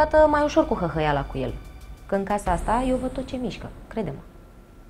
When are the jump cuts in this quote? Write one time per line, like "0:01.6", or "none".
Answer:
none